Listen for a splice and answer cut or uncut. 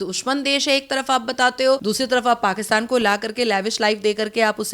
cut